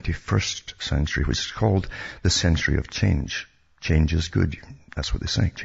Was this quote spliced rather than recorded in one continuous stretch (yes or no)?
no